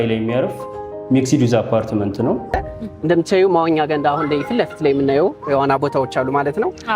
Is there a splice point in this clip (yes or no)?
yes